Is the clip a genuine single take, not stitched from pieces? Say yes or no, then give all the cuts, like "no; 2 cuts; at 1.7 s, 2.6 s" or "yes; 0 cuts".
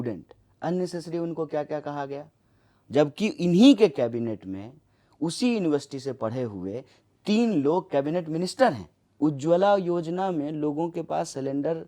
no; 1 cut; at 9.0 s